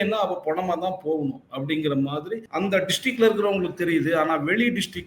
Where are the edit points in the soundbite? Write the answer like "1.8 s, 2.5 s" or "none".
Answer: 2.4 s

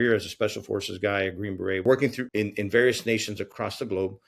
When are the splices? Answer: 1.8 s, 3.5 s

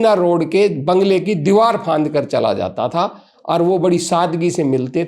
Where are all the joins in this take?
none

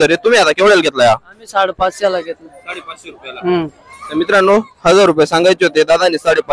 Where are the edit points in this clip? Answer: none

